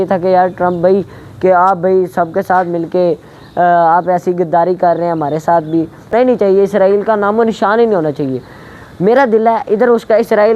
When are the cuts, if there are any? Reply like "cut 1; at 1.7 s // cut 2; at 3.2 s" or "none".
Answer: cut 1; at 6.1 s